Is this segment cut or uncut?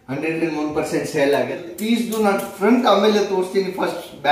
cut